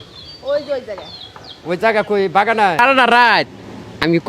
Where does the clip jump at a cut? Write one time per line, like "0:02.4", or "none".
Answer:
0:02.8